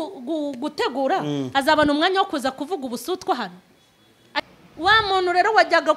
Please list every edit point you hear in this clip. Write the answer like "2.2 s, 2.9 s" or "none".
4.4 s